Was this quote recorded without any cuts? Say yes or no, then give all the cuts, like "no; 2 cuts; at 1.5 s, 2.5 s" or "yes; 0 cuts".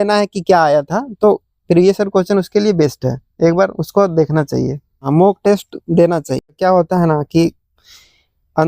no; 2 cuts; at 5.0 s, 6.5 s